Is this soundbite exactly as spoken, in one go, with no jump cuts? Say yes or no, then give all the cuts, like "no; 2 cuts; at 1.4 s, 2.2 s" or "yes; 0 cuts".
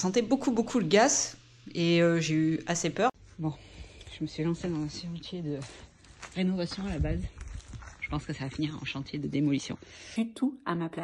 no; 2 cuts; at 3.1 s, 10.1 s